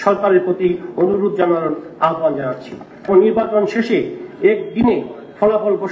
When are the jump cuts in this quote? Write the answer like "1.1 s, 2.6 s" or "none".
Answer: 3.0 s